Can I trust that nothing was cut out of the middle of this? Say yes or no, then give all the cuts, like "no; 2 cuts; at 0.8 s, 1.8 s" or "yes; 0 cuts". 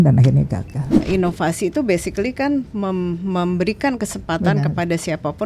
no; 1 cut; at 1.0 s